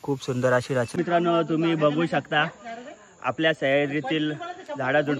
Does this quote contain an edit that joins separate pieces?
yes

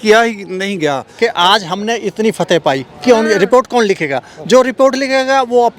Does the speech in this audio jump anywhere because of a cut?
yes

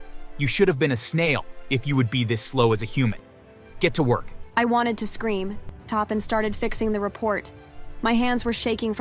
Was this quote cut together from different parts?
yes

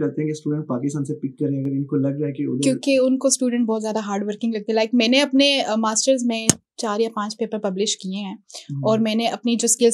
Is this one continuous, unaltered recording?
yes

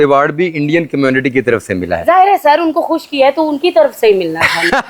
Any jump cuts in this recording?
no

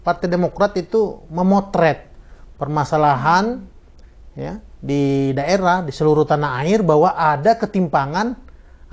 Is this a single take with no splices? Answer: yes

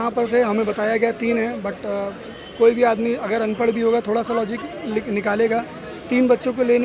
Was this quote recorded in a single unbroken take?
yes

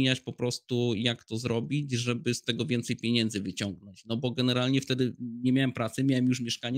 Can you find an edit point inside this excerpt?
no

